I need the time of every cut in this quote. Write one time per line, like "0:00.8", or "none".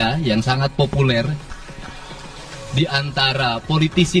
none